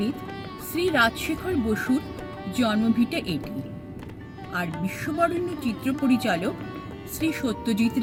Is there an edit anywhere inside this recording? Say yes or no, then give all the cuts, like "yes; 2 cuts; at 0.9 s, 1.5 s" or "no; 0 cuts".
no; 0 cuts